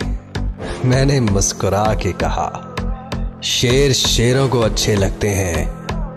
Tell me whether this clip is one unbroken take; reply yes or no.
yes